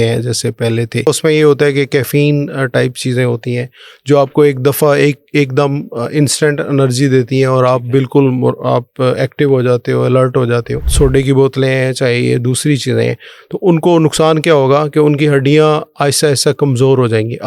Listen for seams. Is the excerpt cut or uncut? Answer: cut